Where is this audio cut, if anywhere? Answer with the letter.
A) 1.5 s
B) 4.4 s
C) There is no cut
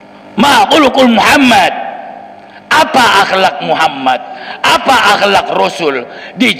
C